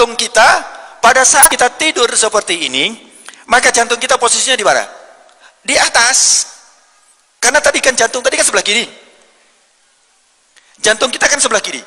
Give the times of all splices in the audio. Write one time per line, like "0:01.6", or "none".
0:01.5